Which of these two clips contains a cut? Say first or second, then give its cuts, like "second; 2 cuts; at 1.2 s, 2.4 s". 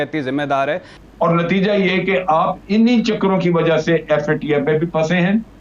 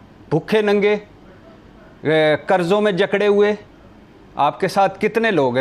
first; 1 cut; at 0.9 s